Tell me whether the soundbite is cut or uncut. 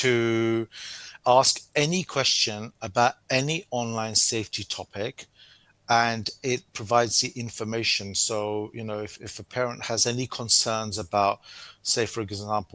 cut